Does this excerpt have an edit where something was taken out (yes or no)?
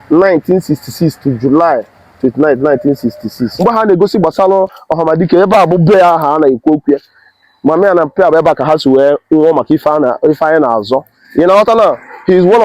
yes